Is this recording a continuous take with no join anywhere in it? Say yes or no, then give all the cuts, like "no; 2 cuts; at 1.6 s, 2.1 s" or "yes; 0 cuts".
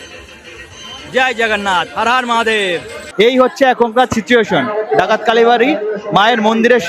no; 1 cut; at 3.1 s